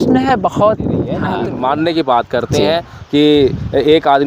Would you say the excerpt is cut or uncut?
cut